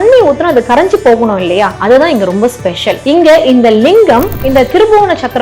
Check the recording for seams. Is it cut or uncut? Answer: cut